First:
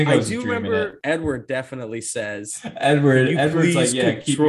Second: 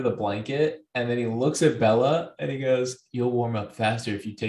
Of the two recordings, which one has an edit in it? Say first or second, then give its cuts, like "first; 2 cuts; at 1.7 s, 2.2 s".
first; 1 cut; at 1.0 s